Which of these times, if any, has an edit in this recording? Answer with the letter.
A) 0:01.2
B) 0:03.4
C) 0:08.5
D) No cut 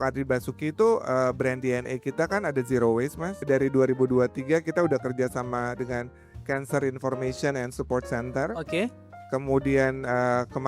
B